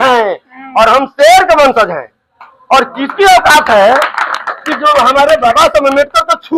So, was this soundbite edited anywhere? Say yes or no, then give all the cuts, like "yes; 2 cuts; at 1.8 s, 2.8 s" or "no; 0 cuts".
no; 0 cuts